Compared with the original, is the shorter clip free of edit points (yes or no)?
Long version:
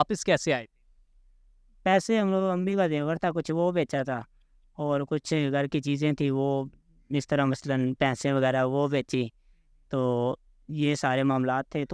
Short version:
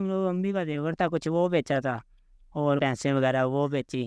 no